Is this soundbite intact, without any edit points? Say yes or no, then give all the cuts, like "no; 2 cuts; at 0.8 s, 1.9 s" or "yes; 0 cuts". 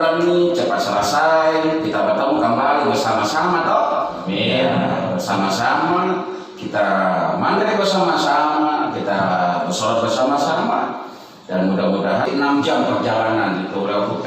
no; 1 cut; at 12.3 s